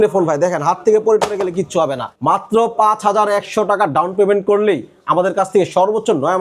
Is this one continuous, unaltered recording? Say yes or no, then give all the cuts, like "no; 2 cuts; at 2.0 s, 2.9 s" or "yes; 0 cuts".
no; 1 cut; at 2.1 s